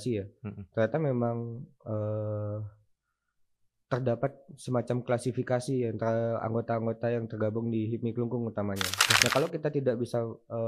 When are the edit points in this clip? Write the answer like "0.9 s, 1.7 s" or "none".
9.0 s